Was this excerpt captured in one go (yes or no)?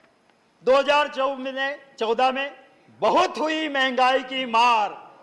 yes